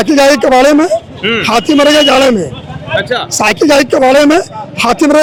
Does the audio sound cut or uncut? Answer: uncut